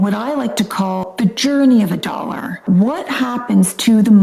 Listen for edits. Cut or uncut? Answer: cut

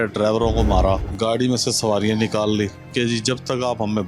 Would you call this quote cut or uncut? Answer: cut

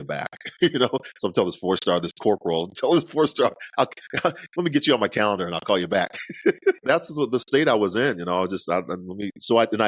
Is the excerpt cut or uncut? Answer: cut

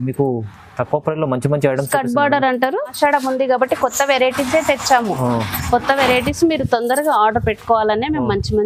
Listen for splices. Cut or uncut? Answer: cut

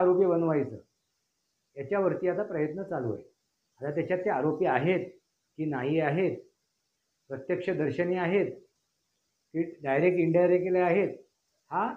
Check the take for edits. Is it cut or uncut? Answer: uncut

